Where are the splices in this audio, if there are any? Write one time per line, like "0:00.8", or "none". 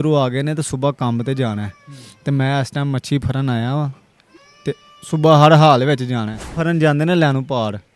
0:06.6